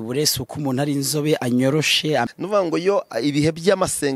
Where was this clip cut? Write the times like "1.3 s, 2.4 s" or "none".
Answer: 2.2 s